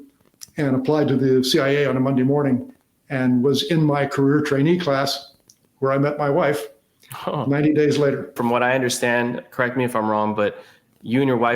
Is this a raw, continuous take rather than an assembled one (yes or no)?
no